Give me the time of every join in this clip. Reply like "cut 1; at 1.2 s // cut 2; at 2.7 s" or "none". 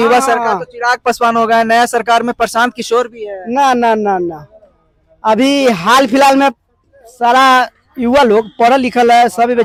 none

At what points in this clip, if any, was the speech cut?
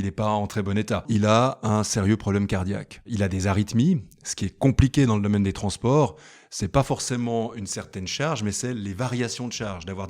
cut 1; at 1.1 s // cut 2; at 3.1 s

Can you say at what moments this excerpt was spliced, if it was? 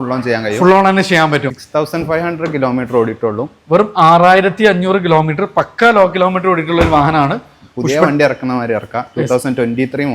cut 1; at 1.6 s

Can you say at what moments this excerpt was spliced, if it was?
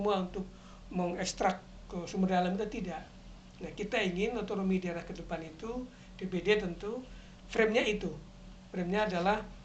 none

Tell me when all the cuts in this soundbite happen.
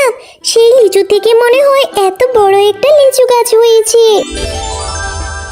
cut 1; at 4.4 s

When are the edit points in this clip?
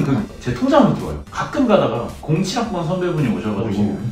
cut 1; at 1.2 s

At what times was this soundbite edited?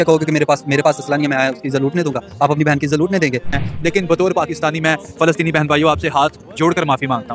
cut 1; at 3.6 s

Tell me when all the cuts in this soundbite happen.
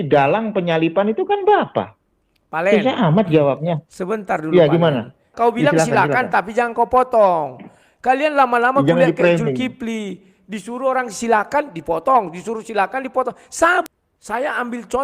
cut 1; at 5.2 s // cut 2; at 13.8 s

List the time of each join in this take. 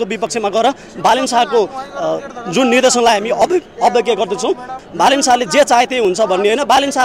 cut 1; at 4.8 s

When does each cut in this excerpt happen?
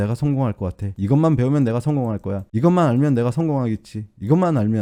none

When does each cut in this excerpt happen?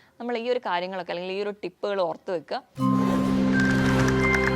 cut 1; at 2.7 s

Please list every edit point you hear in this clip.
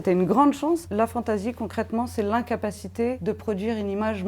cut 1; at 0.9 s // cut 2; at 3.2 s

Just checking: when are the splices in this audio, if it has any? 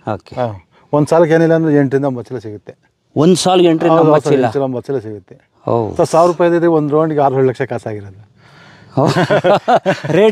none

